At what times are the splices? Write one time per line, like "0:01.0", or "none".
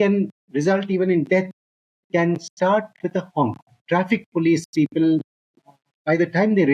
0:03.7